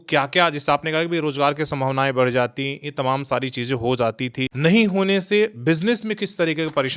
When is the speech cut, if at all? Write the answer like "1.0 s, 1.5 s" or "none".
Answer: 4.5 s